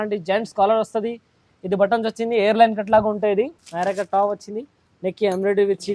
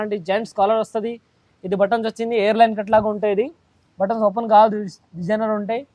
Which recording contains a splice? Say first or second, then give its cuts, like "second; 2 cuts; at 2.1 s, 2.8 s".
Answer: first; 1 cut; at 3.6 s